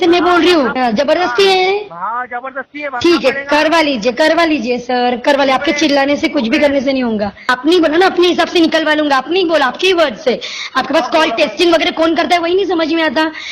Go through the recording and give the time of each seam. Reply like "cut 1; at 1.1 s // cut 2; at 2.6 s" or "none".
cut 1; at 0.8 s // cut 2; at 7.4 s